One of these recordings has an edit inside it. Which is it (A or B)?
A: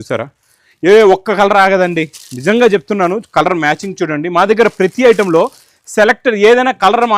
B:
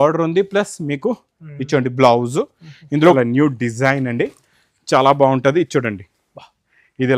B